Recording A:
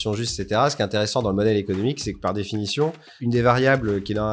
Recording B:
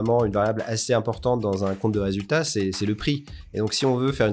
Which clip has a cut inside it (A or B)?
A